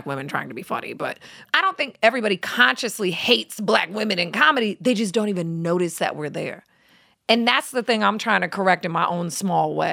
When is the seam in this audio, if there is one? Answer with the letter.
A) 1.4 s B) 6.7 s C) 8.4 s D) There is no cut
A